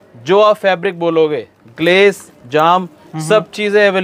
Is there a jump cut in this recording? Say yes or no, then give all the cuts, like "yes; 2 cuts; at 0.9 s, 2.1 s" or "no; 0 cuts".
no; 0 cuts